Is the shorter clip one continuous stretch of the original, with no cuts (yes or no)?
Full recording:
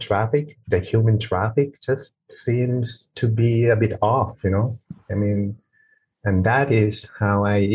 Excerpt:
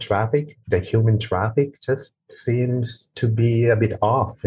yes